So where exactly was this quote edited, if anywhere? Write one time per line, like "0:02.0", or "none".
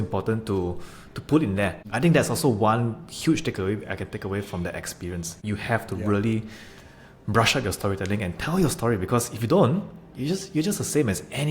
0:01.8
0:05.4